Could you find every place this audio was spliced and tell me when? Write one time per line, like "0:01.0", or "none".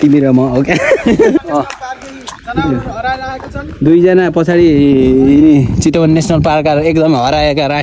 0:01.4